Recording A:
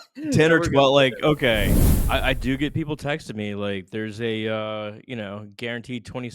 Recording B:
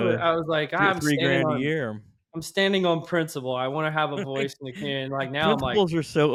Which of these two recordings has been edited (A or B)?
A